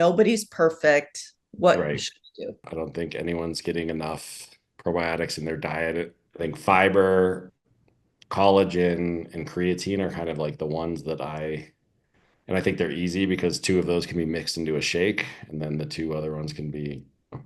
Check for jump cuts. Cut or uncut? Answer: cut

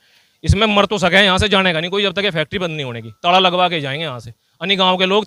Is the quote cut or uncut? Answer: uncut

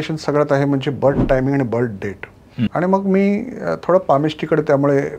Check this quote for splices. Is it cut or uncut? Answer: cut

